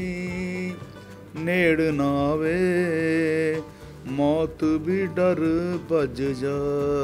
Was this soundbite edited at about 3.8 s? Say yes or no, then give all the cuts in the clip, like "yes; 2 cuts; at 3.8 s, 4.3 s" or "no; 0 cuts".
no; 0 cuts